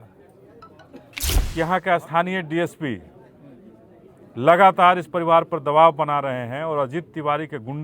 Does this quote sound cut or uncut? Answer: cut